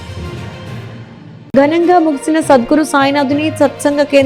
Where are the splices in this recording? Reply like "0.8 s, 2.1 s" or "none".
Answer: 0.9 s